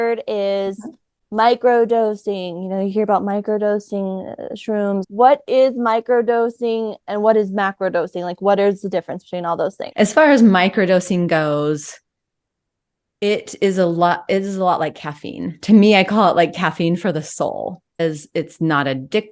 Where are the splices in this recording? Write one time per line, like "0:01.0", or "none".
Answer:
0:05.0
0:09.8
0:18.0